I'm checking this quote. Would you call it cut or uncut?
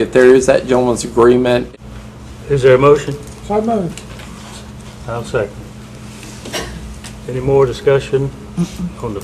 cut